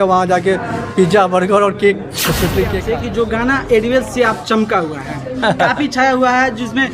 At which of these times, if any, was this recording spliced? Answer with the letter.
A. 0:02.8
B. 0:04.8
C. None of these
A